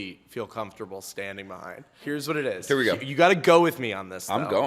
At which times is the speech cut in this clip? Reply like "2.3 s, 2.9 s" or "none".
1.9 s